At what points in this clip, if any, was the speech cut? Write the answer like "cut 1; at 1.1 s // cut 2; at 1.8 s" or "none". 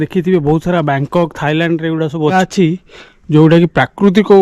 cut 1; at 2.3 s